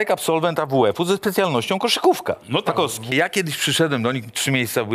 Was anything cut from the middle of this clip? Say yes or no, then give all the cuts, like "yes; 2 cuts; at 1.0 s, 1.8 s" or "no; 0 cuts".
yes; 1 cut; at 3.1 s